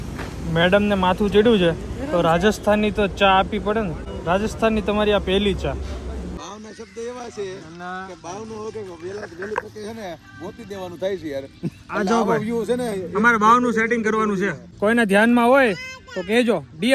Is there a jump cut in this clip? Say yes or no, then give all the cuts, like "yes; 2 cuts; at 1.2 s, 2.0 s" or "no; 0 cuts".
yes; 3 cuts; at 4.1 s, 6.4 s, 14.7 s